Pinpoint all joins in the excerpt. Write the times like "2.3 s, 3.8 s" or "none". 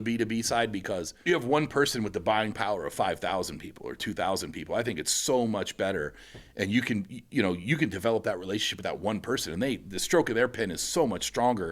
1.1 s